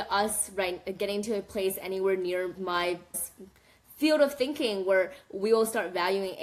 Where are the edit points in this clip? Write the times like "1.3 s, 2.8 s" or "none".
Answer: none